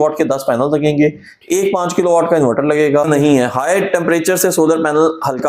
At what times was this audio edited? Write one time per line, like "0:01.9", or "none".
0:03.1